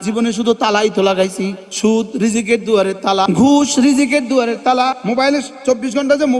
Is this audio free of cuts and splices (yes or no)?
no